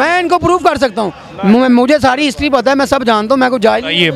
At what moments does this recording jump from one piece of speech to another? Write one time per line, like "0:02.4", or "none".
none

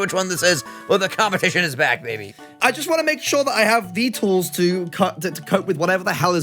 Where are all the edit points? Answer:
0:02.6

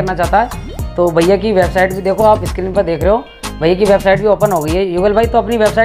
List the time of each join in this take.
none

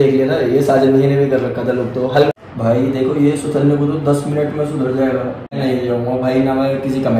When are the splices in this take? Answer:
0:02.3
0:05.6

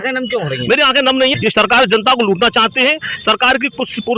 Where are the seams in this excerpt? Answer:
0:01.4

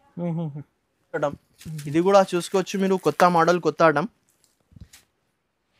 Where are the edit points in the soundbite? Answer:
0:01.2

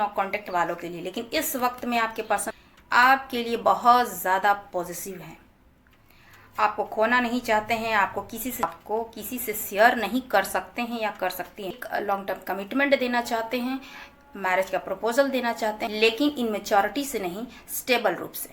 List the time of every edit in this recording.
0:11.7
0:15.9

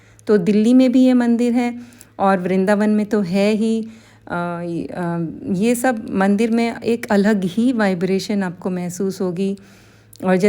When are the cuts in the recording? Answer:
none

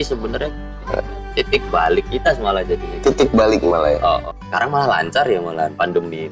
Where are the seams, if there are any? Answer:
0:04.3

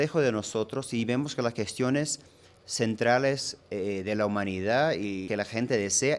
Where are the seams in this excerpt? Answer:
0:05.3

